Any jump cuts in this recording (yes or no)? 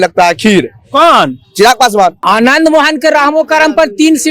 yes